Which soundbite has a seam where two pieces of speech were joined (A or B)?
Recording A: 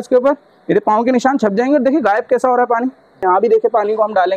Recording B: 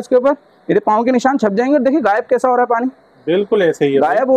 A